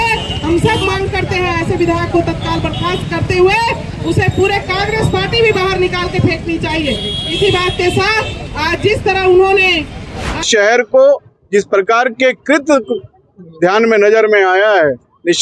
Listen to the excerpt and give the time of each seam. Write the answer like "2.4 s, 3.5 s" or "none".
10.5 s